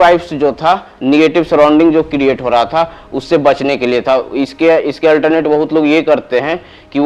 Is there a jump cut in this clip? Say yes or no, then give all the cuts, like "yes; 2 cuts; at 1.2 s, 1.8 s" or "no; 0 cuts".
no; 0 cuts